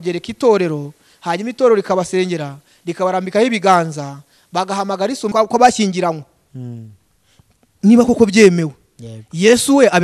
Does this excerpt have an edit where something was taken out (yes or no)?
yes